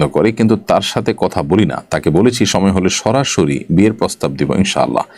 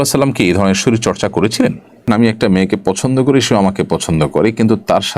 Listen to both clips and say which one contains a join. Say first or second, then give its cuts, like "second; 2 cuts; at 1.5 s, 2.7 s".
second; 1 cut; at 2.1 s